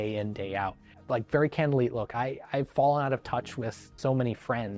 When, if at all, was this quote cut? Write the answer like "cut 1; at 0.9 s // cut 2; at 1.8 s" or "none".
cut 1; at 0.9 s // cut 2; at 3.8 s